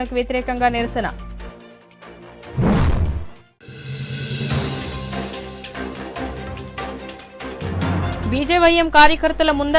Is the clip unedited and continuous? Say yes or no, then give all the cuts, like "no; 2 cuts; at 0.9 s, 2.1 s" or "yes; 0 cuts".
yes; 0 cuts